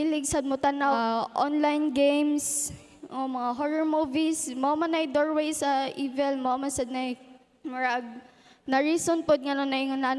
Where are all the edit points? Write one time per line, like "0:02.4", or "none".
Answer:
0:00.9